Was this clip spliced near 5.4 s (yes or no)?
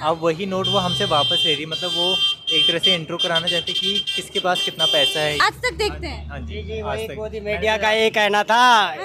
yes